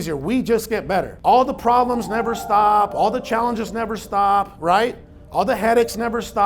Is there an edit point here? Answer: yes; 1 cut; at 1.1 s

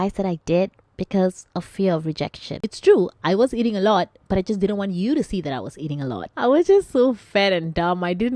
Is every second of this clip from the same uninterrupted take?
no; 2 cuts; at 2.7 s, 6.3 s

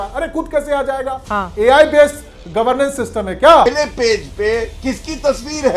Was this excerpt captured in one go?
no; 1 cut; at 3.7 s

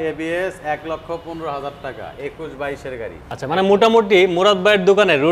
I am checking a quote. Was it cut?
yes; 1 cut; at 3.4 s

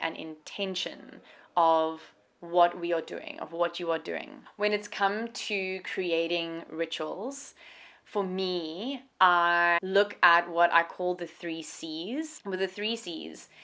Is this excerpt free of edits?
yes; 0 cuts

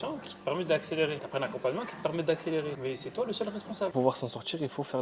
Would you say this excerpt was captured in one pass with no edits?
no; 3 cuts; at 1.2 s, 2.8 s, 3.9 s

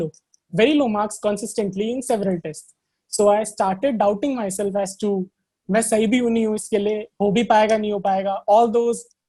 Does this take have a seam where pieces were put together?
no; 0 cuts

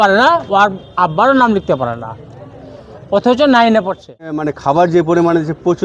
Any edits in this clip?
yes; 1 cut; at 4.5 s

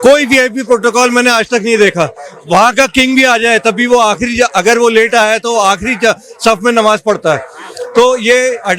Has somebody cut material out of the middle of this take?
no; 0 cuts

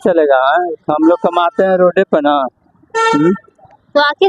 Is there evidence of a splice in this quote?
no; 0 cuts

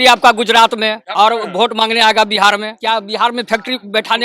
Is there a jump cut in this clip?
yes; 2 cuts; at 1.0 s, 2.7 s

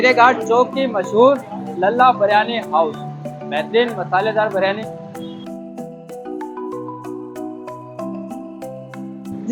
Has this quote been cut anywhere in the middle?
no; 0 cuts

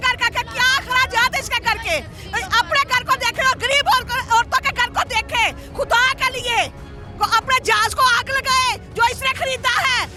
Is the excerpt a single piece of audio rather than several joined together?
yes; 0 cuts

